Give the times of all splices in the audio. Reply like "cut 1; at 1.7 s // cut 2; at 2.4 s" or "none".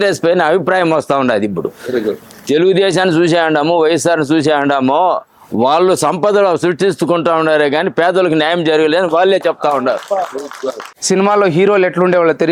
cut 1; at 10.9 s